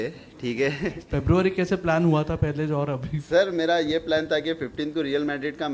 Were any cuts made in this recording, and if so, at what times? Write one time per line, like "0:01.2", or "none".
0:01.0